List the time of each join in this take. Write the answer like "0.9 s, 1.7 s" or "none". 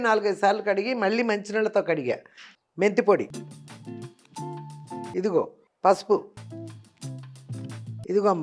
2.4 s